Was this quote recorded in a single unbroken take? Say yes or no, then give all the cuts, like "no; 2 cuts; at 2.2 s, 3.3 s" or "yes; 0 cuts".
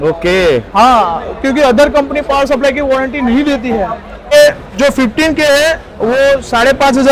no; 1 cut; at 4.3 s